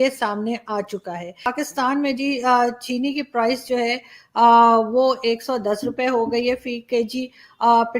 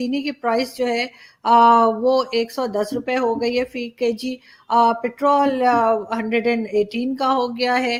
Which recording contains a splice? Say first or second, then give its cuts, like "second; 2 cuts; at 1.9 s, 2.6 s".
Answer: first; 1 cut; at 1.5 s